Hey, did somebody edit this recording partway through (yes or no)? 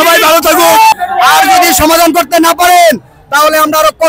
yes